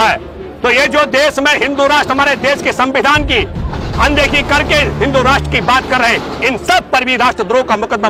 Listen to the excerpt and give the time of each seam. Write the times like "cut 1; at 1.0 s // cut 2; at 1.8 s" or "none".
none

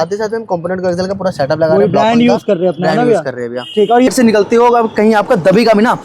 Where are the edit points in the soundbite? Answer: cut 1; at 4.1 s

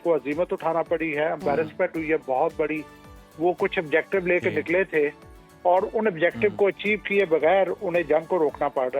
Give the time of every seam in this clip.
none

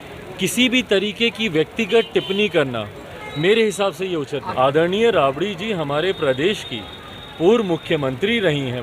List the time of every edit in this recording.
cut 1; at 4.5 s

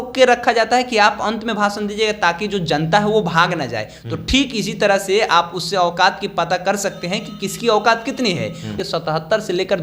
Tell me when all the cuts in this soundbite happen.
cut 1; at 8.7 s

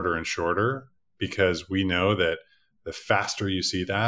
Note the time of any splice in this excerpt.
none

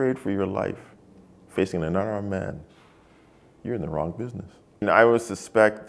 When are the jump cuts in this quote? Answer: cut 1; at 4.8 s

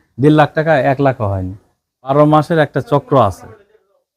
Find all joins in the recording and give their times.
cut 1; at 2.1 s

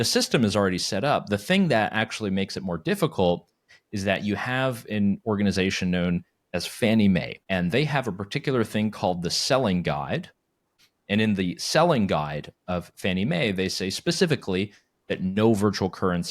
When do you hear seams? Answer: cut 1; at 7.4 s // cut 2; at 10.7 s

